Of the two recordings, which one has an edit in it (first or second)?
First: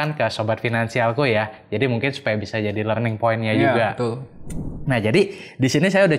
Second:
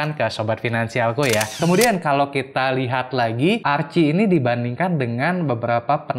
second